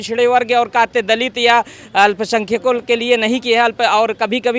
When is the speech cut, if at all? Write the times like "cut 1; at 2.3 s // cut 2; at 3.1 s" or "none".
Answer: none